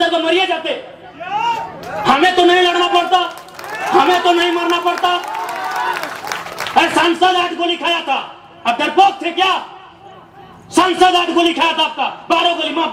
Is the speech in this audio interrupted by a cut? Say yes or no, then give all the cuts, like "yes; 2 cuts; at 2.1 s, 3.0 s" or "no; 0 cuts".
no; 0 cuts